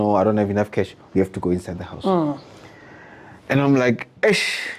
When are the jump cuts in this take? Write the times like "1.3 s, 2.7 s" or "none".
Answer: none